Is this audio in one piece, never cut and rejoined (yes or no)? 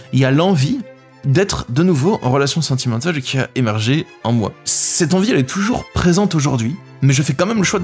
yes